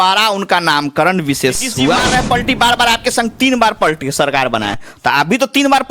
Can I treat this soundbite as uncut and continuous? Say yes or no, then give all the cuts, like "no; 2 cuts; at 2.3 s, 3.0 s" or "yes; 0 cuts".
no; 1 cut; at 2.0 s